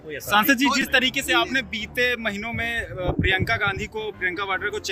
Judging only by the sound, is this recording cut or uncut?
uncut